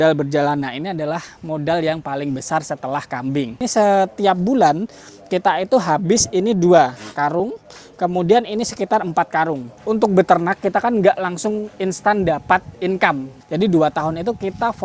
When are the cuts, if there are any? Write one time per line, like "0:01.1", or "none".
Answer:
0:03.6
0:09.7
0:13.4